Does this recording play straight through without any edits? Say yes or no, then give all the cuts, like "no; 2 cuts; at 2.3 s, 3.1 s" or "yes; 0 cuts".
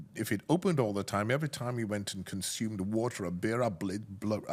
yes; 0 cuts